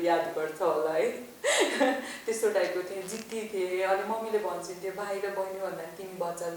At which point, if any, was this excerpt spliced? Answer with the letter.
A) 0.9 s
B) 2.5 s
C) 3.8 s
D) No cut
D